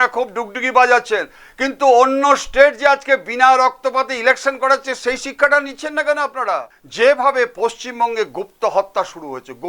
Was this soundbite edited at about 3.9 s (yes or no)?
no